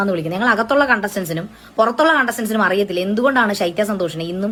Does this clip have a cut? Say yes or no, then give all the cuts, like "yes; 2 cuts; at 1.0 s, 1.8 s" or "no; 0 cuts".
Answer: no; 0 cuts